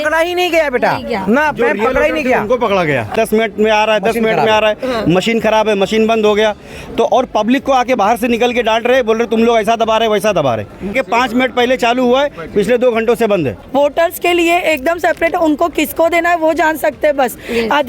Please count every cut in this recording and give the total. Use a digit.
3